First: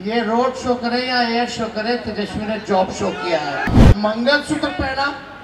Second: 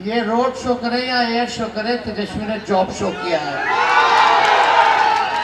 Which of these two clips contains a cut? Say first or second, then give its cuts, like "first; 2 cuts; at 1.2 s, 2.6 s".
first; 1 cut; at 3.7 s